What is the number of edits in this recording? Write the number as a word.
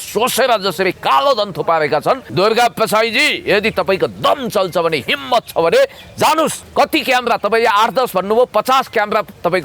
two